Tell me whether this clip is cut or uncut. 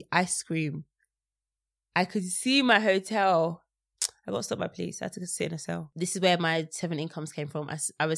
cut